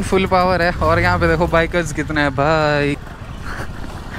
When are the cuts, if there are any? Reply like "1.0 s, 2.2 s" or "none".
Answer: 3.0 s